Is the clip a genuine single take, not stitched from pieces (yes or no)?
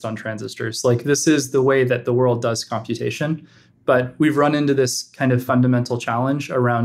yes